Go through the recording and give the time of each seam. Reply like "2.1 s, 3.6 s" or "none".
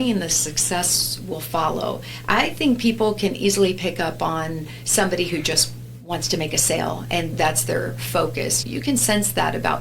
7.3 s, 8.6 s